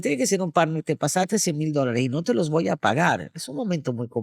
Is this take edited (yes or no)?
no